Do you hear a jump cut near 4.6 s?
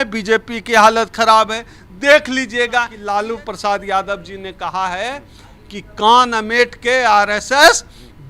no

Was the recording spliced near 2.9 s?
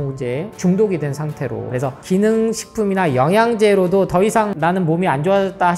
no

